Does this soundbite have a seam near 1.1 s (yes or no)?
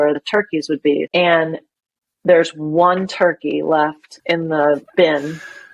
yes